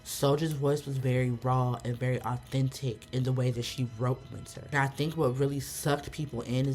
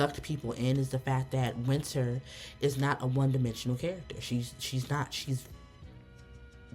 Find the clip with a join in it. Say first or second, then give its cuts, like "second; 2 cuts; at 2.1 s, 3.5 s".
first; 1 cut; at 4.7 s